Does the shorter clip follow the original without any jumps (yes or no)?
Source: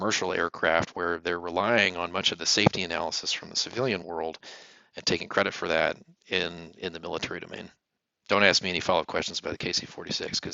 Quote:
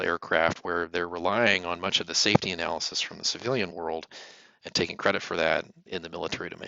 no